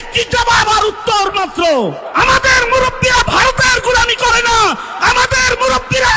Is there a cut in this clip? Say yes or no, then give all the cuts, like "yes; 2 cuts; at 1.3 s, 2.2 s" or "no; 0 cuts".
yes; 1 cut; at 2.1 s